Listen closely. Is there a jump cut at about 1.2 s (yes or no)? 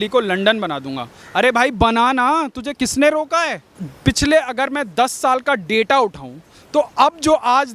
no